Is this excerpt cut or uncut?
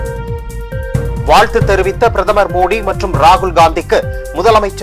cut